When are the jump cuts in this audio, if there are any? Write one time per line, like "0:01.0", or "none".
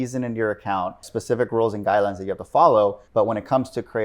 0:01.1
0:03.0